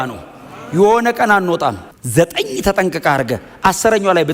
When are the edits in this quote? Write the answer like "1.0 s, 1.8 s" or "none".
1.9 s